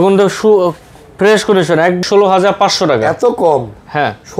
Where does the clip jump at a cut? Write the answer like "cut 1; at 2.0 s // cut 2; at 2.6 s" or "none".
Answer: cut 1; at 2.0 s